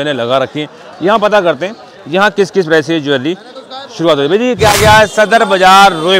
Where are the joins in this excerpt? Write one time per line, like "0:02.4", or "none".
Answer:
0:04.6

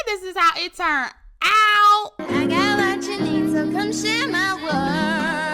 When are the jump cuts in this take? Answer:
0:02.1

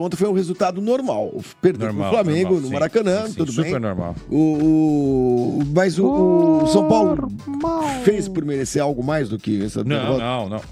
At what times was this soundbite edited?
none

